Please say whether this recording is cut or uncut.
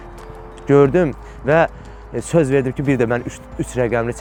uncut